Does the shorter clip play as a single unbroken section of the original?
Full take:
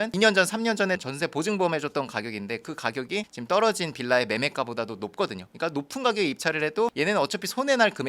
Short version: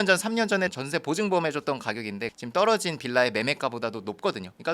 no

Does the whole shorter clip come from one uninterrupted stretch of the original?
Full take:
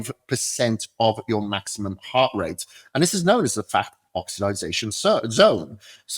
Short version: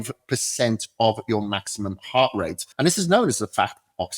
no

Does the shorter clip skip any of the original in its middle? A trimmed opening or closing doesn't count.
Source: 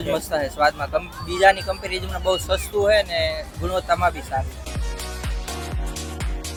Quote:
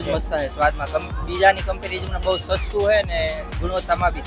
no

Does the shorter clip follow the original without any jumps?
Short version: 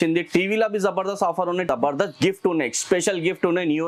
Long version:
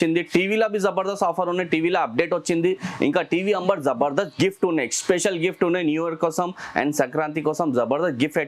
no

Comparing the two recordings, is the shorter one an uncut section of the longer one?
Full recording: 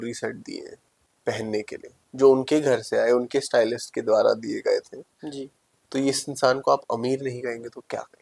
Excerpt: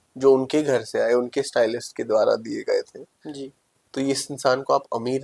yes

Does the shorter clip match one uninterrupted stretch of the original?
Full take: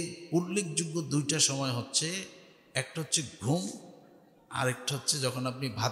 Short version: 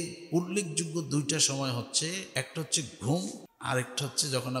no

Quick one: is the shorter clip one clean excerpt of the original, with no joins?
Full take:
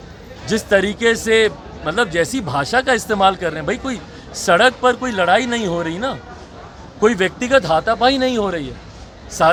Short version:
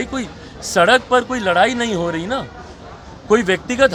yes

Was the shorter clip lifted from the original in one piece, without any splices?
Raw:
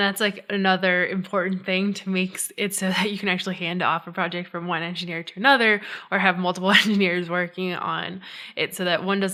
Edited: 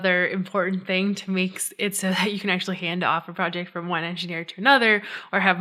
yes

